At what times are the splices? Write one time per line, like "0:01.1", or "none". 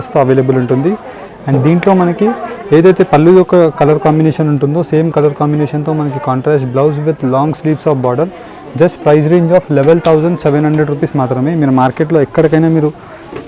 none